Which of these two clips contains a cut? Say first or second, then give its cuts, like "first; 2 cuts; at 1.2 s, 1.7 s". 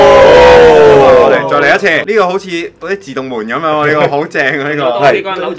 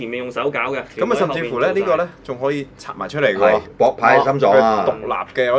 first; 1 cut; at 2.0 s